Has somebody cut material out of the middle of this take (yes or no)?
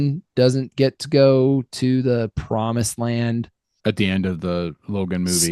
yes